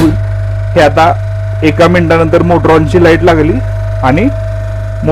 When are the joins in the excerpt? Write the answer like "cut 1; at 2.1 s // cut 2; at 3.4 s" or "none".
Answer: none